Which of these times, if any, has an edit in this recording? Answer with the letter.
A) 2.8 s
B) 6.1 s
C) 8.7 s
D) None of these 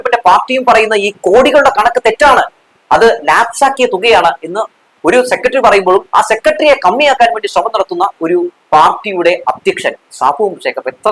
D